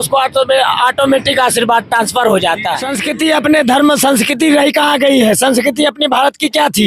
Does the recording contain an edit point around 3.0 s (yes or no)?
yes